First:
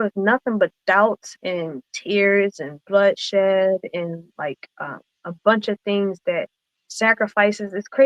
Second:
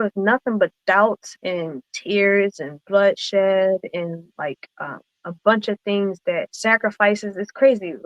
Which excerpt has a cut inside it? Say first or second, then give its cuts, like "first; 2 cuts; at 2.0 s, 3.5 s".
second; 1 cut; at 6.5 s